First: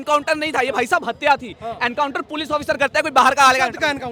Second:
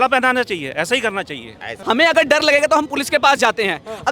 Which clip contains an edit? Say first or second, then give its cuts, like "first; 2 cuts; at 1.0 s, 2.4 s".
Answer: second; 1 cut; at 1.7 s